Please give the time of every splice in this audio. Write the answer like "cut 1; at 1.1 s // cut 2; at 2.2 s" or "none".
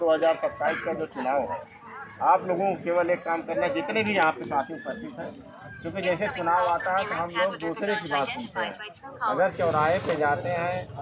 none